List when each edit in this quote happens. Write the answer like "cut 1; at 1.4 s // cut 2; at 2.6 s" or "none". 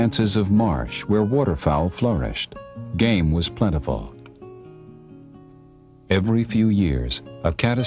cut 1; at 1.7 s